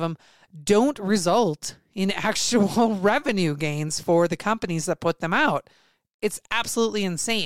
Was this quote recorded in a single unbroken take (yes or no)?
yes